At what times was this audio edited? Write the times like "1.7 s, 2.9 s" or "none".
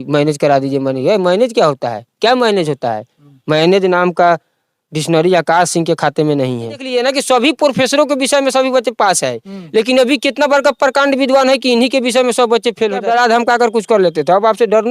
6.8 s, 13.0 s